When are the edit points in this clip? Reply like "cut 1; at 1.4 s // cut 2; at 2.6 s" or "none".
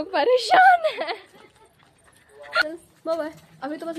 cut 1; at 2.6 s